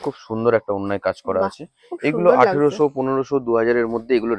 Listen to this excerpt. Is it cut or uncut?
uncut